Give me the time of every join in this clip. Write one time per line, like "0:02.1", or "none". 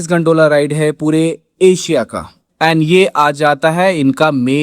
0:02.4